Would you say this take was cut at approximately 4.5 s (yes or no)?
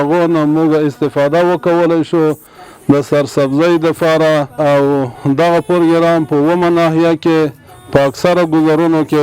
yes